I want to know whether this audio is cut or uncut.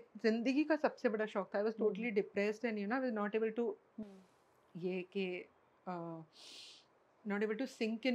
uncut